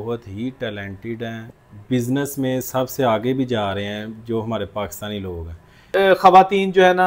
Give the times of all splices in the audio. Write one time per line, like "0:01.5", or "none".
0:01.5
0:05.9